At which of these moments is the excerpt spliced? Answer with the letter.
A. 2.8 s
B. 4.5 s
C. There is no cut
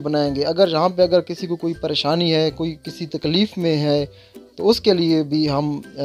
C